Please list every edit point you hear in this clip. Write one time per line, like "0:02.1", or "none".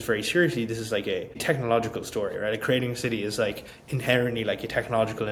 none